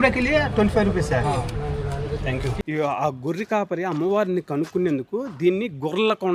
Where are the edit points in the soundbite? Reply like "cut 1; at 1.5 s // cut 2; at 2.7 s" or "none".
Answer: cut 1; at 2.6 s